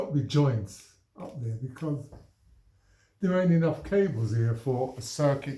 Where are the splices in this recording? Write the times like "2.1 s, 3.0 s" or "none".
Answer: none